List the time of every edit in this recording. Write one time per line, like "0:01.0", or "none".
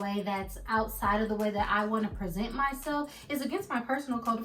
none